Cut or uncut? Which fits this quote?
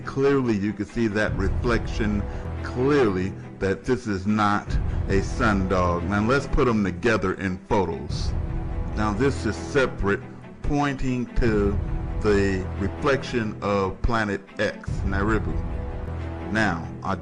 uncut